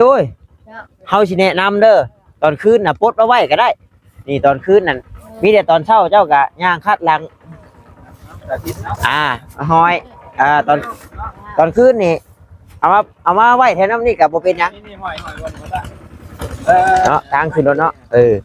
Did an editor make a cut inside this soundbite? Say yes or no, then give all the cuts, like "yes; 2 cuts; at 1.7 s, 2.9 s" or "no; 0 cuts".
no; 0 cuts